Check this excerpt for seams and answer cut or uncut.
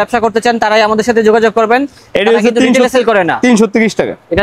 uncut